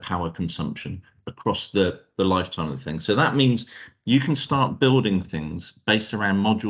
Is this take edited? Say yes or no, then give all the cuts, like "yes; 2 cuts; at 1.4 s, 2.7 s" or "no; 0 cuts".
no; 0 cuts